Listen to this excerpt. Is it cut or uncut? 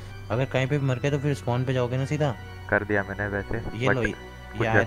uncut